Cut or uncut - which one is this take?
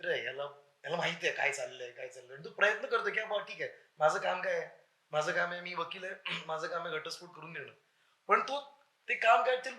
uncut